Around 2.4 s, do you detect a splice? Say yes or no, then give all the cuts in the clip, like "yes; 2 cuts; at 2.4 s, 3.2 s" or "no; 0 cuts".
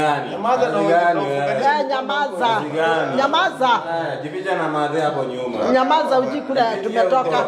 no; 0 cuts